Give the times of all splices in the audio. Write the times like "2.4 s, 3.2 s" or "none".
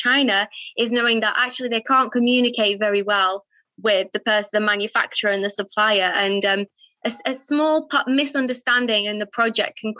none